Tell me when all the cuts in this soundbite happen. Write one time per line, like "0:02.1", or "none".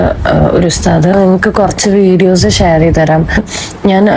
none